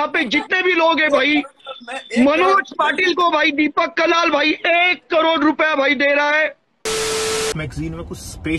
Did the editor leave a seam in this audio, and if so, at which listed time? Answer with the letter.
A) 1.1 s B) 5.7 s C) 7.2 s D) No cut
C